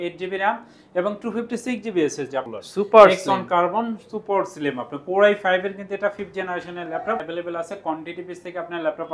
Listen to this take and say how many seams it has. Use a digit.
2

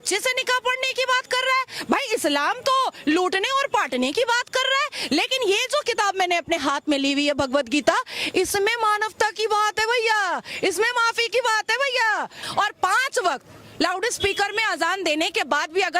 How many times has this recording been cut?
1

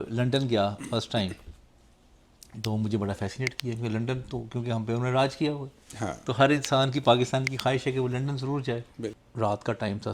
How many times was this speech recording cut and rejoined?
1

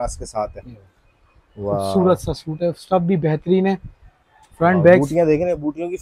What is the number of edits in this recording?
0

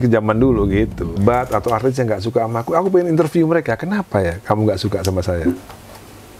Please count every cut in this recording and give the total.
2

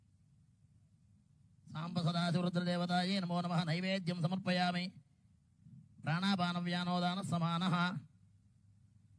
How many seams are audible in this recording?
0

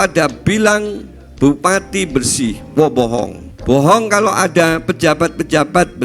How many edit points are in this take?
1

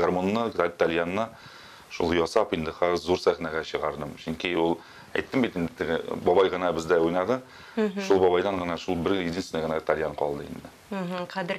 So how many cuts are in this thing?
0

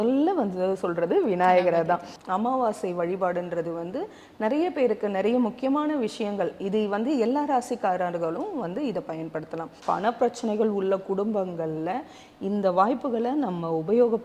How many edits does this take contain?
2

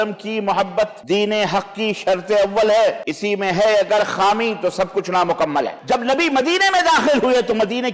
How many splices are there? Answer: 3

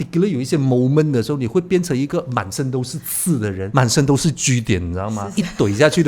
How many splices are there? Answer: 2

